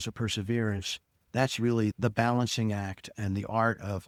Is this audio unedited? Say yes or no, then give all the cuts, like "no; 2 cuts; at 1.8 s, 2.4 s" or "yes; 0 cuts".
yes; 0 cuts